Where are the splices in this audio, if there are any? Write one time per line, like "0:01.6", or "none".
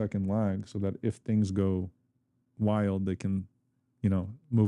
none